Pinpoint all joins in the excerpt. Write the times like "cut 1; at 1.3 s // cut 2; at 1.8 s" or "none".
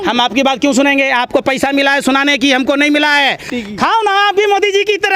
cut 1; at 3.5 s